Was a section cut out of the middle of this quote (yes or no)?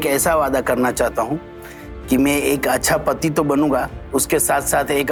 no